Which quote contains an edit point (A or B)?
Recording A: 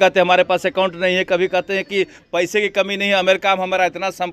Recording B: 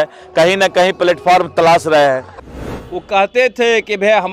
B